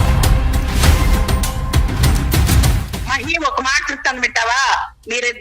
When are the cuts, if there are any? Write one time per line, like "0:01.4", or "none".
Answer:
0:02.5